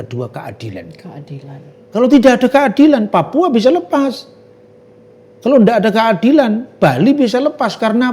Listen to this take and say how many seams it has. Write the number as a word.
zero